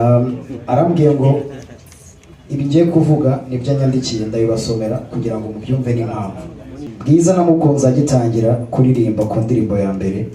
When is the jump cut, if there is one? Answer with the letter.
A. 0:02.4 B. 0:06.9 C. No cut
B